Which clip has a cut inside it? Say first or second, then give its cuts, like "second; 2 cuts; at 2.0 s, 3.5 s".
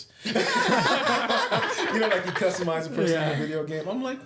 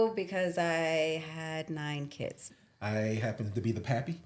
second; 1 cut; at 2.5 s